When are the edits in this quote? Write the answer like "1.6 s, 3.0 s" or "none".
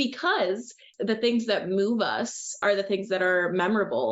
0.9 s, 2.6 s